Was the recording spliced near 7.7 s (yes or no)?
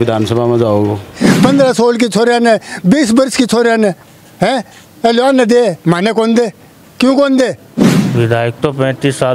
yes